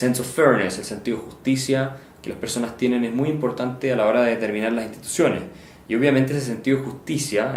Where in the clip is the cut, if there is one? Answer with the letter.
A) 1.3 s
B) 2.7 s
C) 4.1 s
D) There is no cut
D